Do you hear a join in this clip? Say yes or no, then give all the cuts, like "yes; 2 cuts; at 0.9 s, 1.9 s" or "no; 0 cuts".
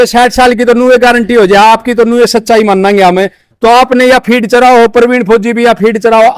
no; 0 cuts